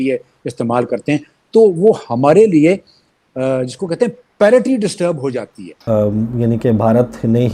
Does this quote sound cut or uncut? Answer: cut